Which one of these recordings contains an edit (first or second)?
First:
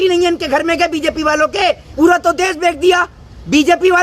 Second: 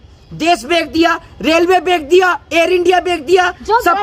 first